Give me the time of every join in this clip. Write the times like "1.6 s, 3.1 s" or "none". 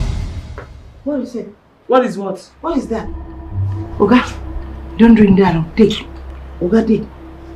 none